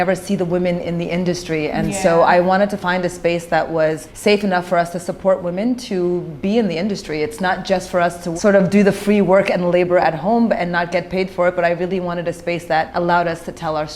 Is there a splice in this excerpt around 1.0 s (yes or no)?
no